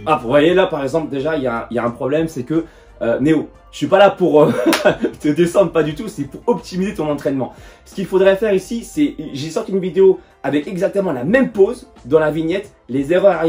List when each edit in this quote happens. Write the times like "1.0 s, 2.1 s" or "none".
none